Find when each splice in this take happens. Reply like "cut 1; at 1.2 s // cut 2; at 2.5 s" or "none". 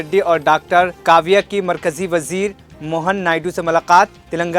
none